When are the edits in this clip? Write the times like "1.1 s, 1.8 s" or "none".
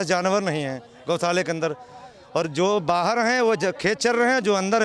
none